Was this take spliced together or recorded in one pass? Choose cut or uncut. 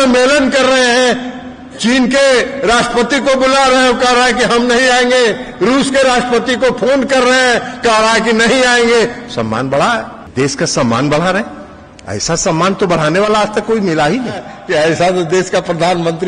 cut